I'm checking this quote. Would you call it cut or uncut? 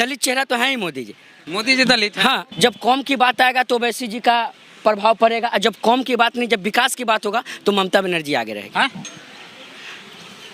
cut